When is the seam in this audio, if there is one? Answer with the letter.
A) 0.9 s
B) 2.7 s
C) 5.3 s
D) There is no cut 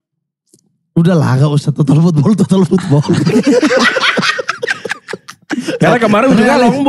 D